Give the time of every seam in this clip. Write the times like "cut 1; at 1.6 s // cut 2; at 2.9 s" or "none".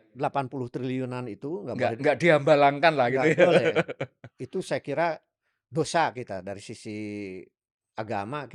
none